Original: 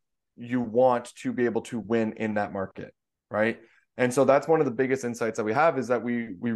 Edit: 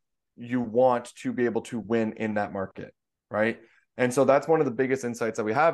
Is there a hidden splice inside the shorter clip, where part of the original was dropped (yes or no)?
no